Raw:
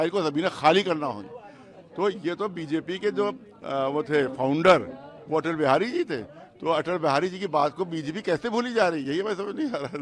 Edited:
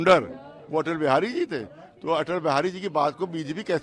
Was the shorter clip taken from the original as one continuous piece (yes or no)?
yes